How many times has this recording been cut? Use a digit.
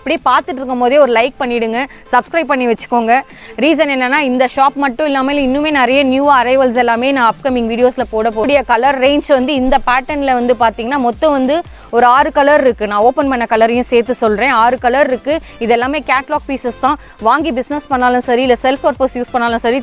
1